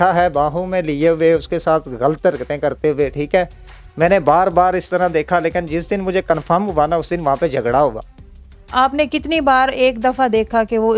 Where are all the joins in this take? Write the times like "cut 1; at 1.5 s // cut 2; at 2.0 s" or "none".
none